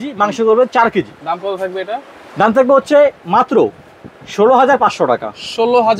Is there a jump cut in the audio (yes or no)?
no